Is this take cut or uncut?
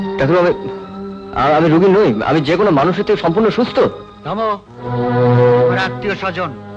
uncut